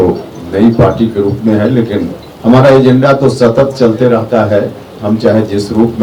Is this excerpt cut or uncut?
cut